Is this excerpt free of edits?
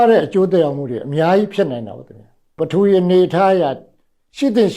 no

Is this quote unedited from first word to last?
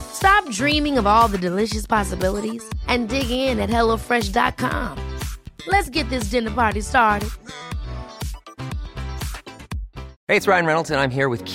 yes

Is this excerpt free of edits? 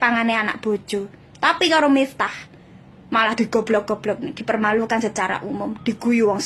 yes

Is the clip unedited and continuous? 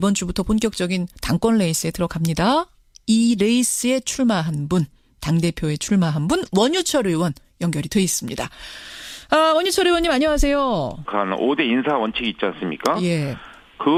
yes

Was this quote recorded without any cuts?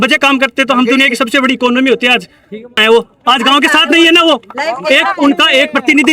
no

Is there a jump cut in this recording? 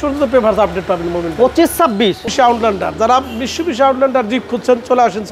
yes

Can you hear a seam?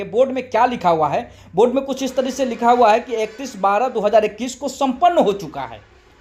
no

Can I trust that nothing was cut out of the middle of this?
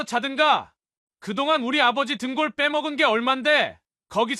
yes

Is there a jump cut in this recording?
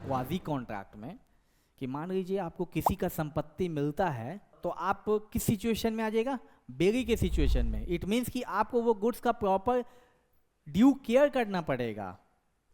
yes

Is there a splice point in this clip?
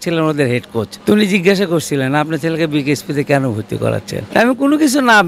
yes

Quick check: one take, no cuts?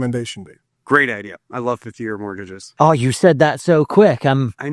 yes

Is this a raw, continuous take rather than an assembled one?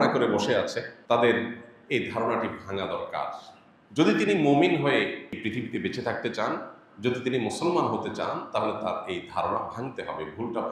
no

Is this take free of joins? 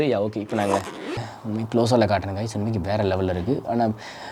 no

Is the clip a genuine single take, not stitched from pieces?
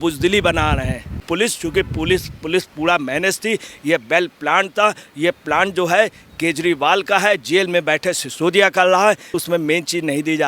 no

